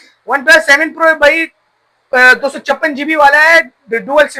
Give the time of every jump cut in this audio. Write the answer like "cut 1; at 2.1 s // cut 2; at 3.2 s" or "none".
none